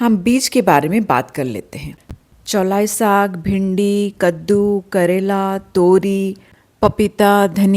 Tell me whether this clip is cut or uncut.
cut